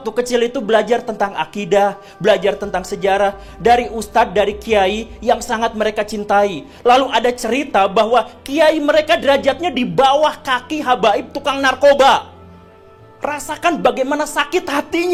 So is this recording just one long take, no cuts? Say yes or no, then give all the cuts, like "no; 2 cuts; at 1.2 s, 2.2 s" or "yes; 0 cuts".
yes; 0 cuts